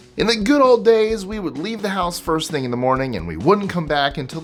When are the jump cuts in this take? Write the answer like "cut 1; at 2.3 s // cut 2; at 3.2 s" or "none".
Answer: none